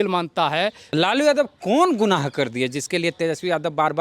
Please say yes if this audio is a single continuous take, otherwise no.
no